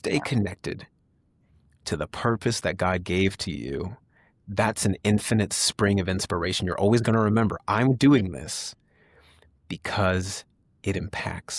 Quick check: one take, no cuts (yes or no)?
yes